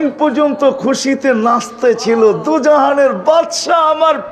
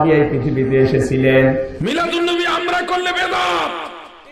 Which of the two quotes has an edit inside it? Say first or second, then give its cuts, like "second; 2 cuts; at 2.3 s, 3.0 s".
second; 1 cut; at 1.7 s